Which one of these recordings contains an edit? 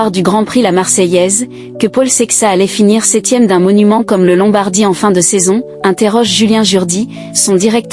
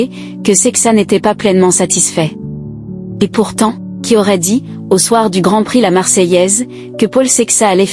second; 1 cut; at 3.9 s

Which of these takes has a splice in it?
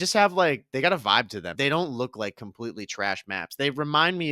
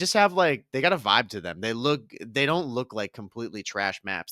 first; 1 cut; at 1.4 s

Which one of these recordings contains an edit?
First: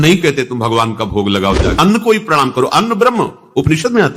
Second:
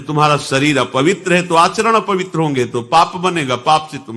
first; 1 cut; at 1.8 s

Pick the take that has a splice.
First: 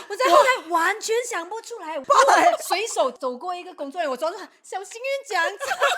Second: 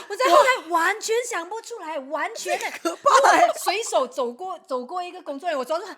first; 2 cuts; at 2.0 s, 3.2 s

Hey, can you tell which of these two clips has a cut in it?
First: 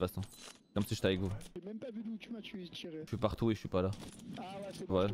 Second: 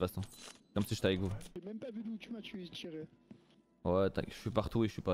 first; 1 cut; at 3.0 s

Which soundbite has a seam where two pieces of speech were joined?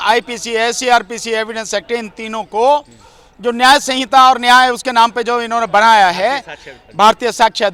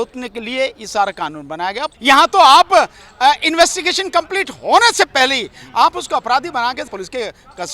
second; 1 cut; at 1.9 s

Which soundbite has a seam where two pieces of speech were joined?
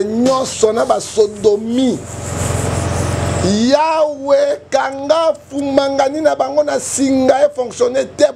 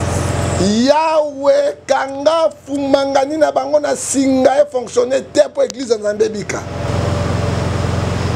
second; 1 cut; at 6.9 s

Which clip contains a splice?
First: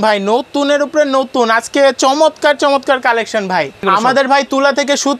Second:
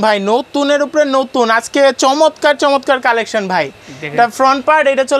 first; 1 cut; at 3.8 s

